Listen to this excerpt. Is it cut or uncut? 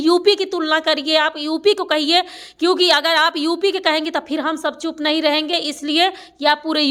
uncut